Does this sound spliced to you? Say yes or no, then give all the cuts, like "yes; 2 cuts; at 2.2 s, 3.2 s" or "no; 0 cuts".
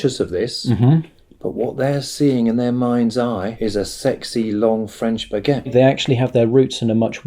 yes; 2 cuts; at 3.5 s, 5.7 s